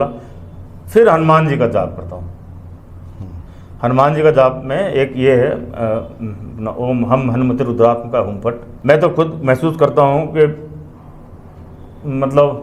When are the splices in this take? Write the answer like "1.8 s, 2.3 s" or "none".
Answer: 8.7 s